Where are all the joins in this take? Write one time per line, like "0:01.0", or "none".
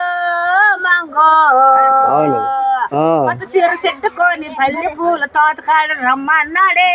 none